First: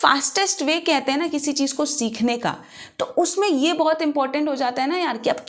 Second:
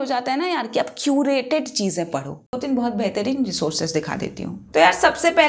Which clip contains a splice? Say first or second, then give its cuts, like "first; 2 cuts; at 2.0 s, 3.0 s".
second; 1 cut; at 2.6 s